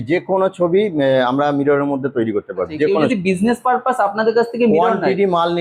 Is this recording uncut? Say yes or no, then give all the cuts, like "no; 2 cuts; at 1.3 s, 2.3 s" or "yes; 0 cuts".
no; 1 cut; at 3.1 s